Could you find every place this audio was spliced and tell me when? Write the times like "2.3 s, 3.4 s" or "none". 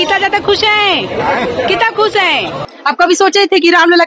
2.7 s